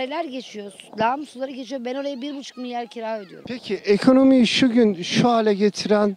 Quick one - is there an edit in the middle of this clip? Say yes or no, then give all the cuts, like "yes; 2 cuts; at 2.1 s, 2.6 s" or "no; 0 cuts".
yes; 1 cut; at 3.3 s